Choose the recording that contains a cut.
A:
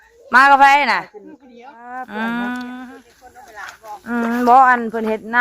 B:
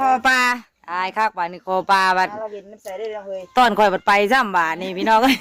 A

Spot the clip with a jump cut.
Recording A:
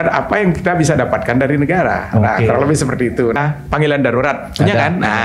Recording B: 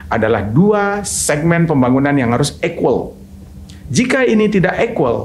A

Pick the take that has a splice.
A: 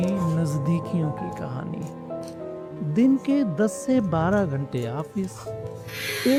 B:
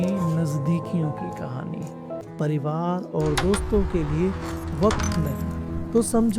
B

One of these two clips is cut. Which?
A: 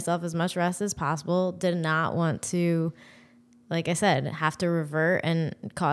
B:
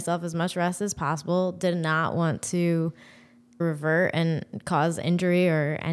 B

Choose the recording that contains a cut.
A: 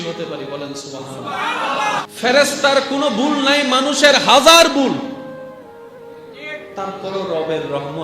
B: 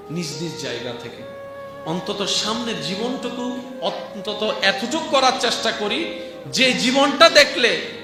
A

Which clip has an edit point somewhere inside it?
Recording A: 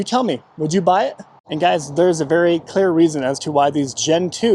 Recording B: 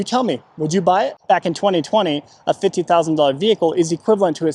B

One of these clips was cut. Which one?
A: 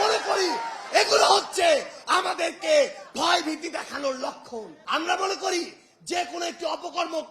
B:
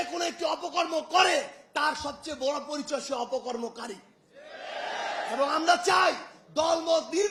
A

